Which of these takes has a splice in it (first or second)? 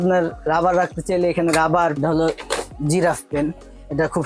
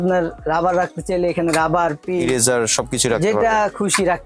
first